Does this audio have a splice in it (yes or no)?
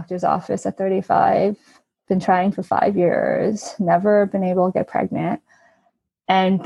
no